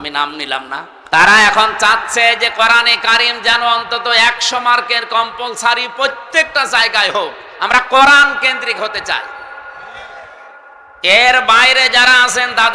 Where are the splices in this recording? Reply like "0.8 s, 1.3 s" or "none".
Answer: 1.0 s